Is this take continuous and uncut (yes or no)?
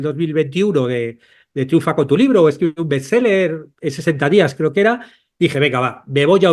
yes